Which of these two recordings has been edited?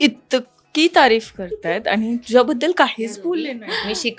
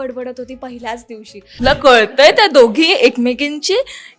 second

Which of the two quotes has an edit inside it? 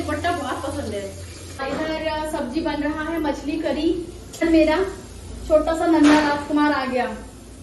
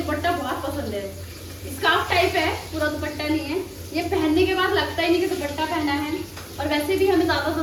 first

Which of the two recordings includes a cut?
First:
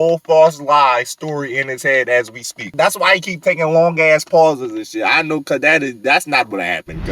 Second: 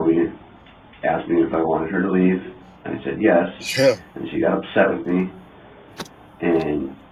first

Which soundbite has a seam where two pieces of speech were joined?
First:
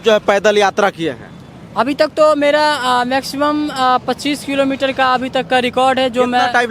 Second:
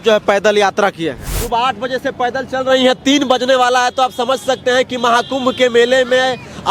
second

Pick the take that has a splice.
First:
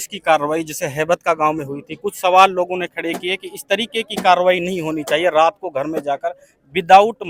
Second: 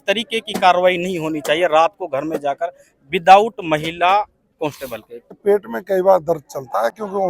second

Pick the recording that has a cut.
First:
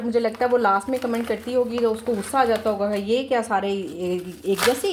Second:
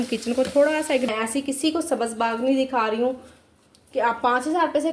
second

